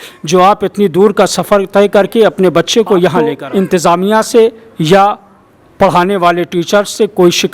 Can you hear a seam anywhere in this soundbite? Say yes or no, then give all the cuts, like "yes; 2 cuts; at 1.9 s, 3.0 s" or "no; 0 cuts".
yes; 1 cut; at 3.4 s